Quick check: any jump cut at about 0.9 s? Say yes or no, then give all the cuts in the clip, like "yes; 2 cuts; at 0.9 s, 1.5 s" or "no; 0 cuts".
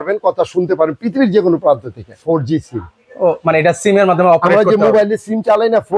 no; 1 cut; at 2.2 s